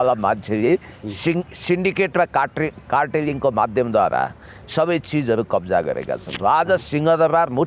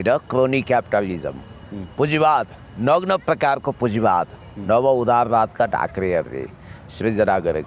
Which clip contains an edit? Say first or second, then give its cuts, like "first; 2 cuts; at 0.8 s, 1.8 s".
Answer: first; 1 cut; at 6.3 s